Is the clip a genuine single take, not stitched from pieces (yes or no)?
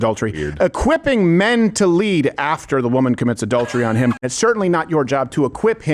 no